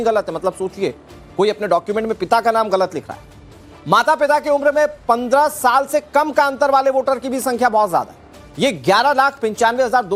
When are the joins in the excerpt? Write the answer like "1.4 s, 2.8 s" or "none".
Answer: none